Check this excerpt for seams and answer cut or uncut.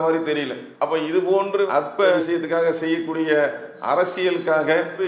cut